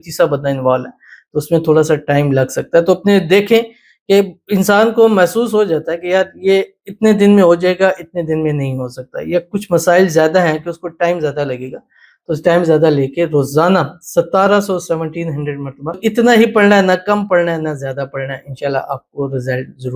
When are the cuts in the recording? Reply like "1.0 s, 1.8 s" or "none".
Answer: 16.0 s